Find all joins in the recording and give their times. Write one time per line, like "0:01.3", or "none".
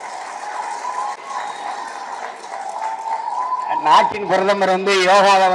none

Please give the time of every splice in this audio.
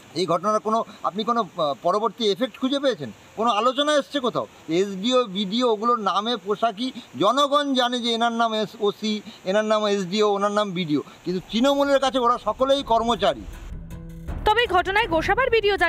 none

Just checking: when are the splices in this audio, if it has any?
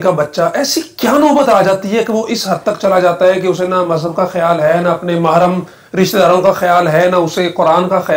none

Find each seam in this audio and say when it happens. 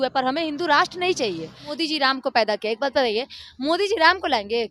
0:01.7

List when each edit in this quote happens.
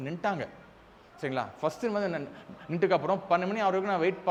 none

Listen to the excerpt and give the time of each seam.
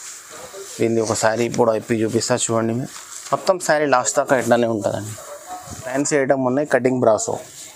0:05.9

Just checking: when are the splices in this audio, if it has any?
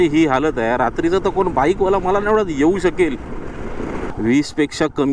0:04.1

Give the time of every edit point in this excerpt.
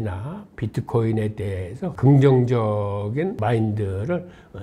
0:02.0
0:03.4

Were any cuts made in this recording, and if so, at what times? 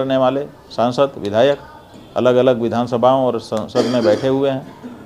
none

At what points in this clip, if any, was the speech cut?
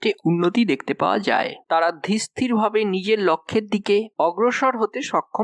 0:01.6

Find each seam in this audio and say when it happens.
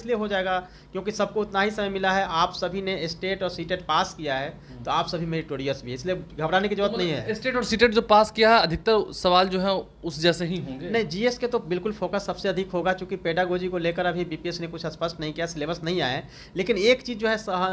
none

